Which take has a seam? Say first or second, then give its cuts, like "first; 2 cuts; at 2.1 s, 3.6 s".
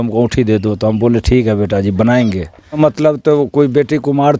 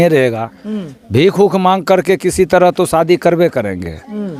first; 1 cut; at 2.8 s